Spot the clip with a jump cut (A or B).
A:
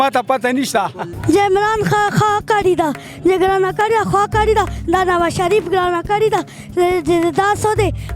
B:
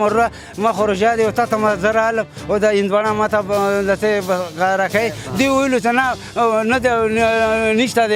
A